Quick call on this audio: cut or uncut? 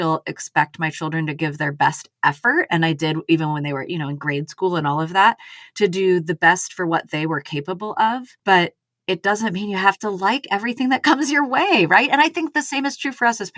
cut